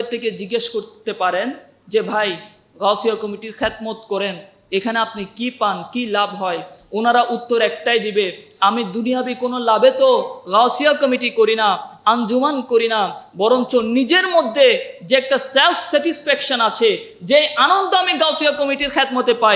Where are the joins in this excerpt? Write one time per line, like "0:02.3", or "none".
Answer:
none